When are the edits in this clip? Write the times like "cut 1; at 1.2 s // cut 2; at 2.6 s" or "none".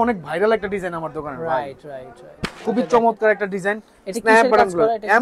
none